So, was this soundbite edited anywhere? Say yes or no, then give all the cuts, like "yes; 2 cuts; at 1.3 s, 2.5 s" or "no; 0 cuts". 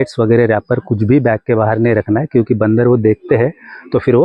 no; 0 cuts